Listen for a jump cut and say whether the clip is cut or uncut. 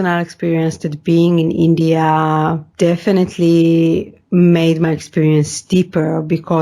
cut